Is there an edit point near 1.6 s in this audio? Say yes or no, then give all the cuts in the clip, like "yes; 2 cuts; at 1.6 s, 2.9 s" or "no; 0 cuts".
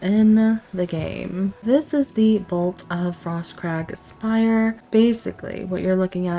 yes; 2 cuts; at 1.6 s, 4.8 s